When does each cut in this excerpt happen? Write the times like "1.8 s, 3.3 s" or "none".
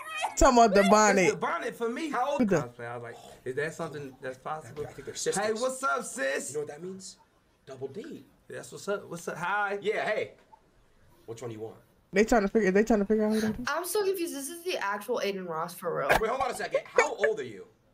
2.4 s, 12.1 s